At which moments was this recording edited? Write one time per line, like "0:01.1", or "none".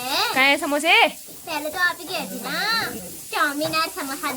0:03.0